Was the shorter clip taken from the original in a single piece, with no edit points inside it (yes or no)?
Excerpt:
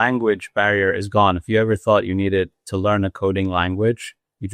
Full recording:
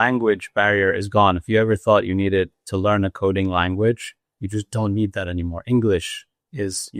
yes